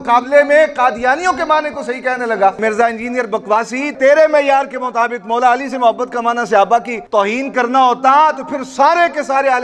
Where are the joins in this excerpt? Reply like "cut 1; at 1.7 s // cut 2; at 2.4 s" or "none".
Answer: cut 1; at 2.6 s // cut 2; at 3.9 s // cut 3; at 7.0 s